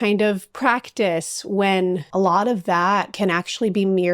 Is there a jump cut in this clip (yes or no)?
yes